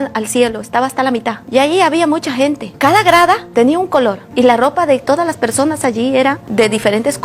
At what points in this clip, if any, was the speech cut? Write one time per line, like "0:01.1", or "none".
none